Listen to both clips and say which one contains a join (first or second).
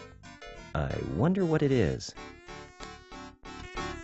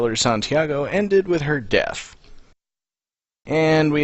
first